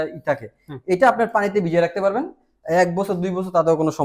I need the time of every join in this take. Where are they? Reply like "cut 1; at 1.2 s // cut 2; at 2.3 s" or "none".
none